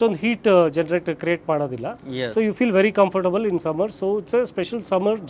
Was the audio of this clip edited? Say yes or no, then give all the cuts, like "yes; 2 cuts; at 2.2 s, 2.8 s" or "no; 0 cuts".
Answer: no; 0 cuts